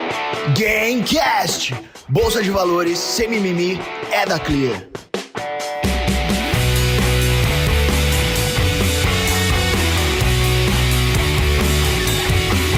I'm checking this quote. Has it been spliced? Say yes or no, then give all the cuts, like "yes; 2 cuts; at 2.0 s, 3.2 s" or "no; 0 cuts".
no; 0 cuts